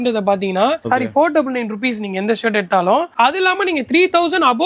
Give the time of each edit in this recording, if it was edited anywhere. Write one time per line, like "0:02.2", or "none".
none